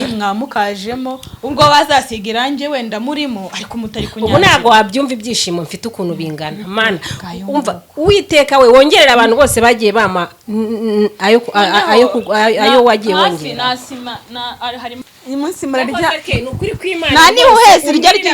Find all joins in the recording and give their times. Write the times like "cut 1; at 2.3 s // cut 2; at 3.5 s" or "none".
cut 1; at 15.1 s